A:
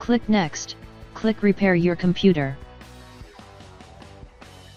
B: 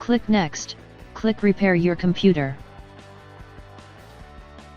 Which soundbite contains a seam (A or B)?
B